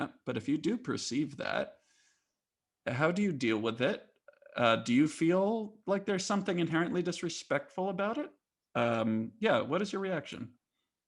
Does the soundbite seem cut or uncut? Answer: uncut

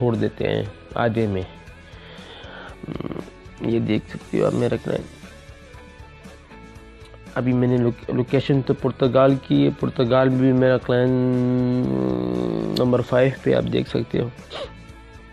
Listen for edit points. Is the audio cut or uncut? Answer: uncut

